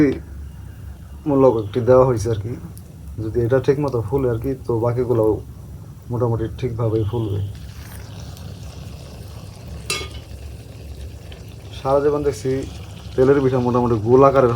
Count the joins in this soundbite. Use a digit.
0